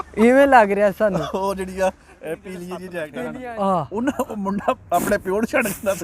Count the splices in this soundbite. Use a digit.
1